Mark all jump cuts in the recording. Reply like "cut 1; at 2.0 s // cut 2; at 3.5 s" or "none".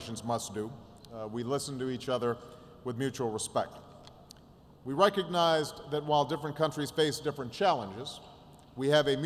cut 1; at 1.7 s